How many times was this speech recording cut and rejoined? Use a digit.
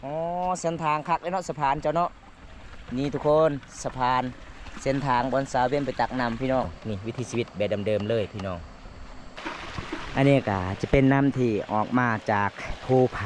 2